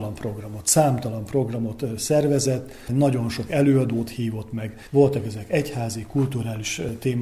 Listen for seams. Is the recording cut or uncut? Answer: uncut